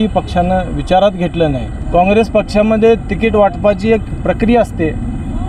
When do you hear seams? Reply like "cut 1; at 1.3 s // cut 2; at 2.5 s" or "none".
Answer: cut 1; at 1.7 s